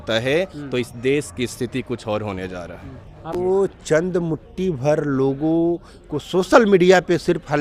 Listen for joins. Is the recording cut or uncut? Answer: cut